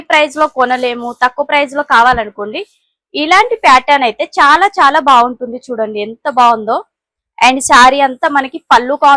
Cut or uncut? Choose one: uncut